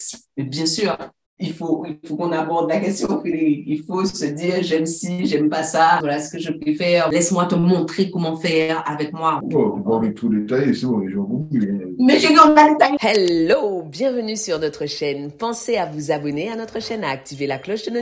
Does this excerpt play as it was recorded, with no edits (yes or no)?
no